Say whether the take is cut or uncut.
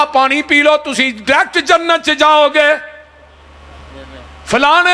uncut